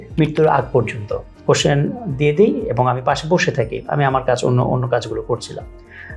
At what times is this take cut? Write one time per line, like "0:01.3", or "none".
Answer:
0:01.3